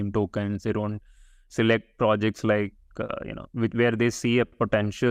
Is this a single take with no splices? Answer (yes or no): yes